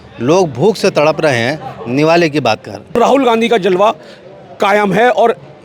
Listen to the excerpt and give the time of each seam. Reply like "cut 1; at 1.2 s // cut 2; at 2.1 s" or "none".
cut 1; at 3.0 s